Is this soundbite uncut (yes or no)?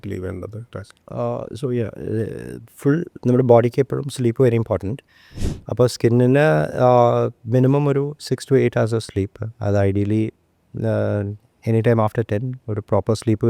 yes